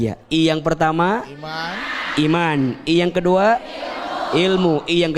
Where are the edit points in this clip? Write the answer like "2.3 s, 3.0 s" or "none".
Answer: none